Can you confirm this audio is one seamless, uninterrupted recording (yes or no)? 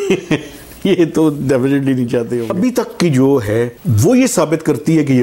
no